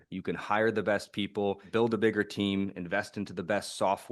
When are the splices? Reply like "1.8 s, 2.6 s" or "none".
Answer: 1.7 s